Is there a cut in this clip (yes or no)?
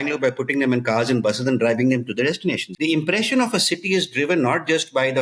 yes